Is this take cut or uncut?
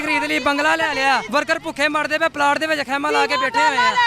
cut